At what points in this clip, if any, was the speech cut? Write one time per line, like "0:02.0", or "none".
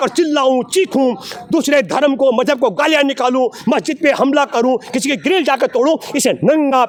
none

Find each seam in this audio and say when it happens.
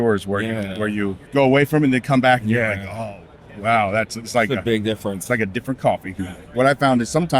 0:01.2
0:06.2

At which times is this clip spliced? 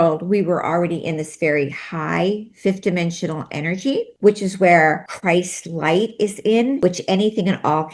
0:04.1
0:05.1
0:06.8

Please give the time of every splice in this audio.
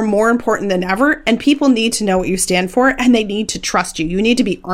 none

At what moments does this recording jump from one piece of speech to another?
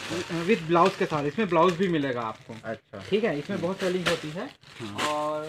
none

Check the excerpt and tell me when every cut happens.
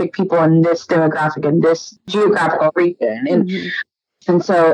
0:02.0
0:03.8

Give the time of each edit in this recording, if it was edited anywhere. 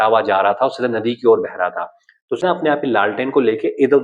0:02.4

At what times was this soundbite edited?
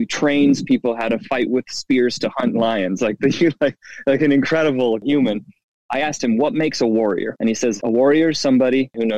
none

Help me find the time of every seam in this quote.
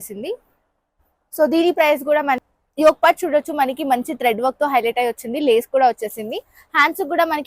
0:02.4

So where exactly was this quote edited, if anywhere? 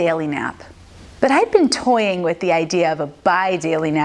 none

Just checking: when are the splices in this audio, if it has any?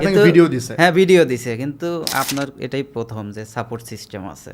none

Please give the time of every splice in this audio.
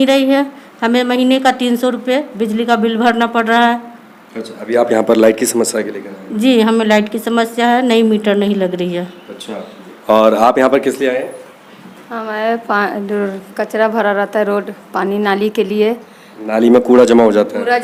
none

